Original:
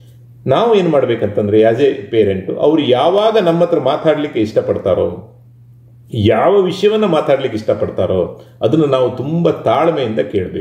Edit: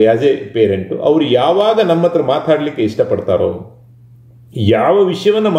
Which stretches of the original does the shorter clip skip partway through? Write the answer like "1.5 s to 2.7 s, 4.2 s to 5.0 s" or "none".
none

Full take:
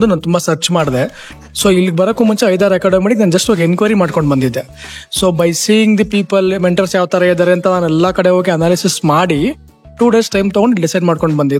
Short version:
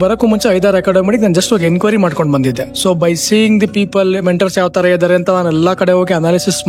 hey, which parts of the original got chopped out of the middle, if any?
4.7 s to 5.1 s

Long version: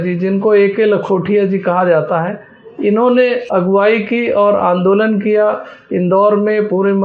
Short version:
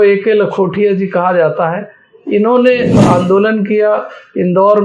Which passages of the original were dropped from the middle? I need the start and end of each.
3.5 s to 4.5 s

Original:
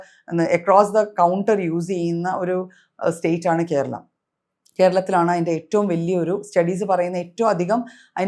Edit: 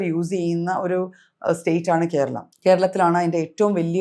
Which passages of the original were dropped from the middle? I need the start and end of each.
4.0 s to 4.6 s

